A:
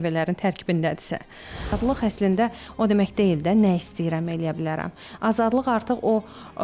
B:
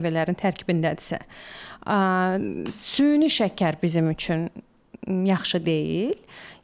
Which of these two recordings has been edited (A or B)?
A